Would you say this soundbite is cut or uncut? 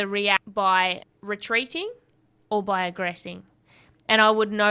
uncut